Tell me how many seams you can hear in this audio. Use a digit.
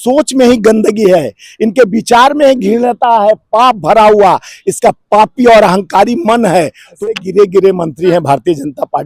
1